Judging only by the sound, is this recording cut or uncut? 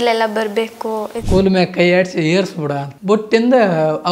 cut